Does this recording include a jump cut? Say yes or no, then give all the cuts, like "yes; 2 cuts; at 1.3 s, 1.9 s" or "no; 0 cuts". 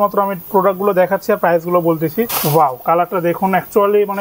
yes; 1 cut; at 2.4 s